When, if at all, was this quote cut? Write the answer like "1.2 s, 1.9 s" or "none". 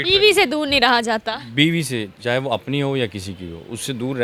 none